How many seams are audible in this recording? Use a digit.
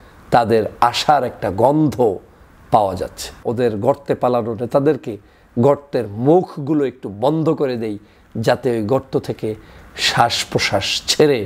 1